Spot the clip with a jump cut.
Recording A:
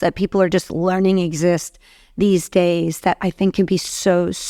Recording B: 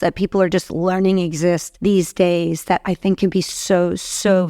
B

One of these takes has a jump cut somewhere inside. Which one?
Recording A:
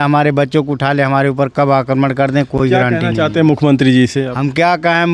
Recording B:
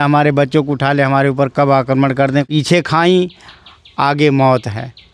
B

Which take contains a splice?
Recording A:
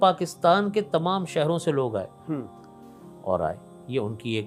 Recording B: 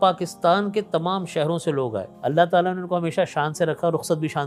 B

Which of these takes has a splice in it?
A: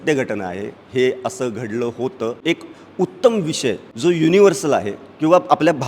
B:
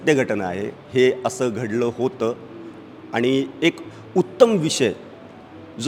A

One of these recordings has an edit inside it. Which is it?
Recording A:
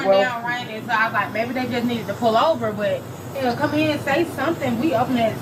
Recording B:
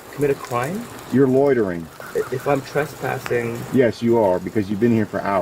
B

